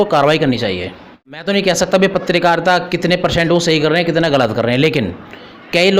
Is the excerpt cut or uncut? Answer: cut